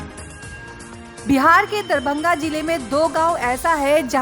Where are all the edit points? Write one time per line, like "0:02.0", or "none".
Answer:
0:00.9